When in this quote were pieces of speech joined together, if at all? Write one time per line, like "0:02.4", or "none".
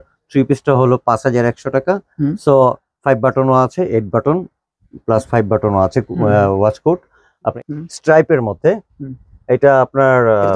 0:07.5